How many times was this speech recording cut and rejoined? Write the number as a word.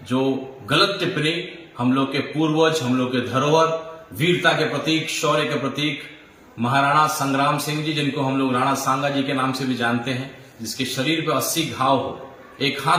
zero